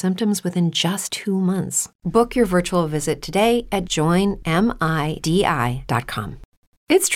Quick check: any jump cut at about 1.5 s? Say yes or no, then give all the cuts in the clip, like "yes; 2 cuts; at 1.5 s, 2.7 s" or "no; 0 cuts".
yes; 2 cuts; at 1.5 s, 3.9 s